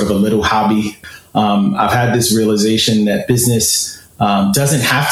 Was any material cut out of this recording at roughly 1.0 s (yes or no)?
yes